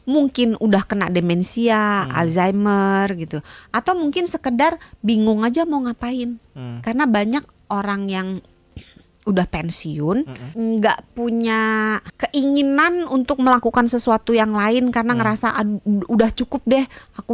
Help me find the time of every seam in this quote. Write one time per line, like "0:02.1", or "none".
0:10.4
0:12.1